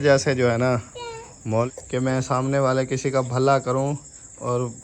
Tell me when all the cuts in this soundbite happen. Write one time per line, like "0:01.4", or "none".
0:01.7